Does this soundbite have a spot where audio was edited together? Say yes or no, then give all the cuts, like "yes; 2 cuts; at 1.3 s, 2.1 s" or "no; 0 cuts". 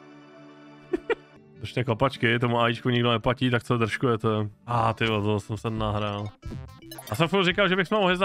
yes; 2 cuts; at 1.4 s, 4.7 s